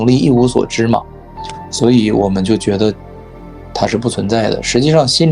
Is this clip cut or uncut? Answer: uncut